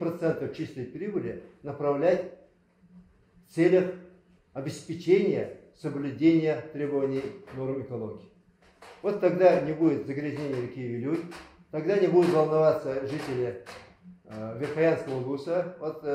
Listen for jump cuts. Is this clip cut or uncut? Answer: uncut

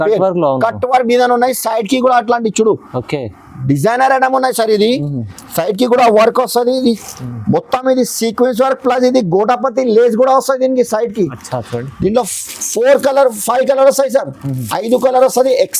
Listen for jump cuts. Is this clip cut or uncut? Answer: uncut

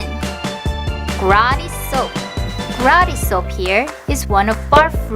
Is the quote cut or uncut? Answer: cut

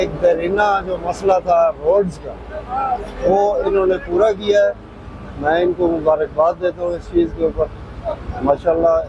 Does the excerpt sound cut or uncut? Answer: uncut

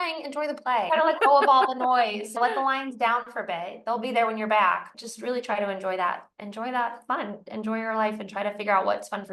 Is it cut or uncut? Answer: cut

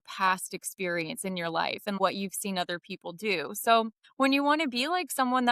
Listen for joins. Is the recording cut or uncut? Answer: cut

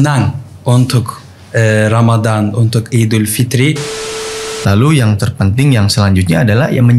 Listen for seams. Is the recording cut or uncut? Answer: cut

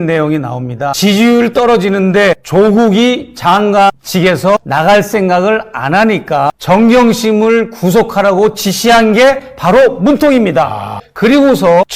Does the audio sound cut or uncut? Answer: cut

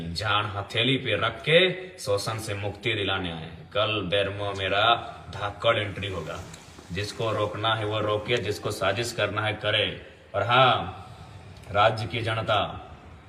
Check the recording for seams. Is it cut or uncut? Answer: uncut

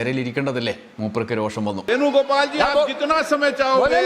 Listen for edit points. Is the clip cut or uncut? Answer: cut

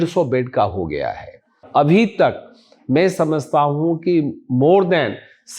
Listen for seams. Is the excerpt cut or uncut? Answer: cut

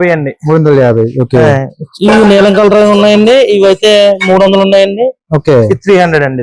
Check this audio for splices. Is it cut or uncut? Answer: uncut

